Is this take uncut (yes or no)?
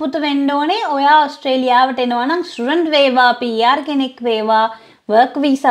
yes